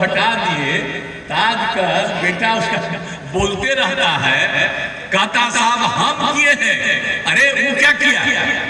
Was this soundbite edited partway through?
no; 0 cuts

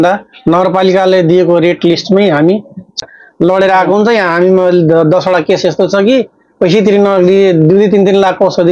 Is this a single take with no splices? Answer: no; 1 cut; at 3.0 s

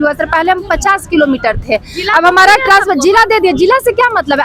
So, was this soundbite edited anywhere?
no; 0 cuts

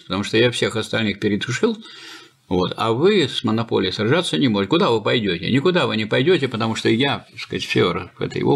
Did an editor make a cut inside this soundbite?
no; 0 cuts

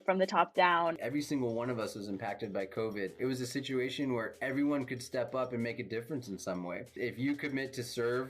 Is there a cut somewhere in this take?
yes; 3 cuts; at 1.0 s, 3.2 s, 6.9 s

